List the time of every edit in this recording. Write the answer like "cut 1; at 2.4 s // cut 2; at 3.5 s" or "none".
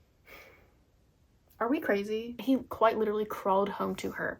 cut 1; at 2.4 s